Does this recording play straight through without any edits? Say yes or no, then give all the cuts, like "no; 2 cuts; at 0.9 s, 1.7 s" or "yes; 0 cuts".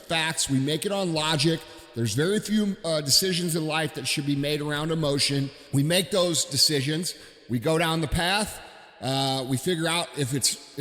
no; 1 cut; at 5.6 s